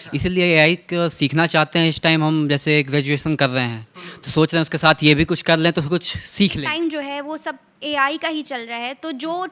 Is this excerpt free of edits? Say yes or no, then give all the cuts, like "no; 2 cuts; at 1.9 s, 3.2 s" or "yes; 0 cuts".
no; 1 cut; at 6.6 s